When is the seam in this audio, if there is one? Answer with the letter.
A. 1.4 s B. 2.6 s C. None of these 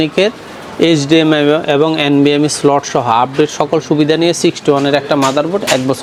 C